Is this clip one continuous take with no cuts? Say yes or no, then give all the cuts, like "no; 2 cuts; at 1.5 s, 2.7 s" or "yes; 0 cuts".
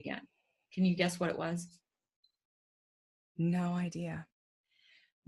yes; 0 cuts